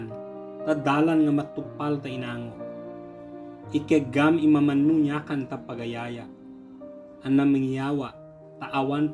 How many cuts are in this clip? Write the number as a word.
two